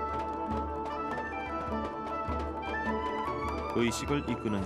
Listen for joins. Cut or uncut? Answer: cut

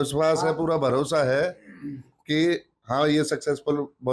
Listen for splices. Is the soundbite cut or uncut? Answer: uncut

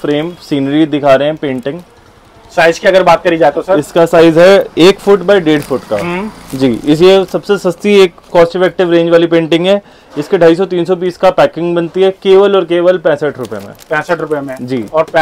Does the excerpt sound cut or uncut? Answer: uncut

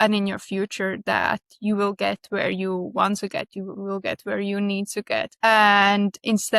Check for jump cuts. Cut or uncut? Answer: cut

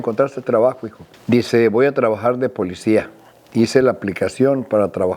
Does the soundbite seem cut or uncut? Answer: uncut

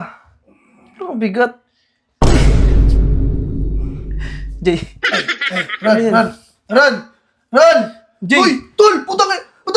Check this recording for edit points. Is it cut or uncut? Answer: uncut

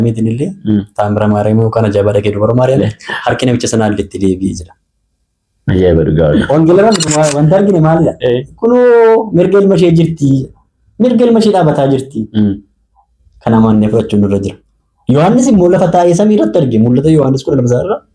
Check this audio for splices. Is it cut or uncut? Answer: cut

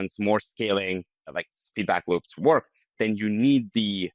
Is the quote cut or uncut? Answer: uncut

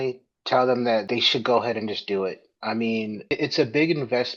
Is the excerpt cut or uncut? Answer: cut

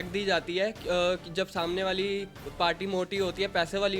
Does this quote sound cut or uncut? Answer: uncut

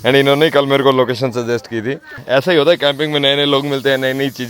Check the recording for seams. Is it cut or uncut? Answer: cut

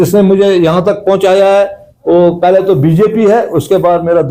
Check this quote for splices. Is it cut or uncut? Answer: uncut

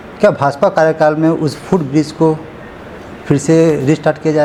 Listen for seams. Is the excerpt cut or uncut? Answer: uncut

